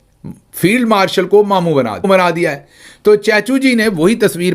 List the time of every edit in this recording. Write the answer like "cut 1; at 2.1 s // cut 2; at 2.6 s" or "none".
cut 1; at 2.1 s